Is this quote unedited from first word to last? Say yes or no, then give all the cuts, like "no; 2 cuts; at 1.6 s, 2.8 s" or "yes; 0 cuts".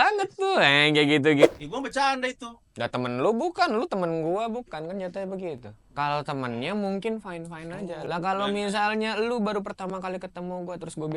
no; 2 cuts; at 1.5 s, 8.0 s